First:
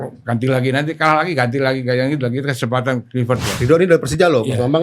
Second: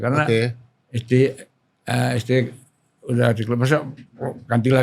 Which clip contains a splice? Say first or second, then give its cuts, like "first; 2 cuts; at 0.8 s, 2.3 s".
first; 1 cut; at 3.5 s